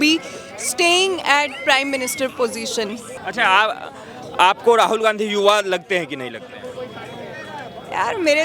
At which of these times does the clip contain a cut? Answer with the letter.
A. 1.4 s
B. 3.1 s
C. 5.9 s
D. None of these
B